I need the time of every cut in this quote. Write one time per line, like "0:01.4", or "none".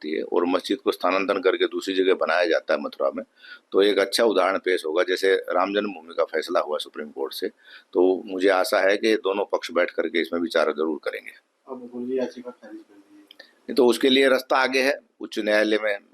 none